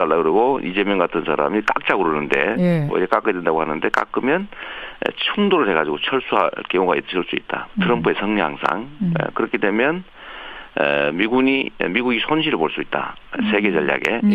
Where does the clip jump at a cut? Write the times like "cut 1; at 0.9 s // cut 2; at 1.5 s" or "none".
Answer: none